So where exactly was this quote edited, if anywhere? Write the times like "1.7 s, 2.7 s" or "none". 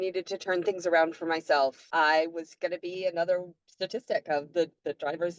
1.8 s